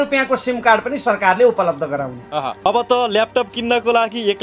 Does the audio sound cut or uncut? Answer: cut